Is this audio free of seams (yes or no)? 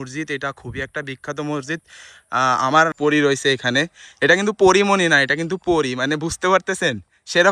no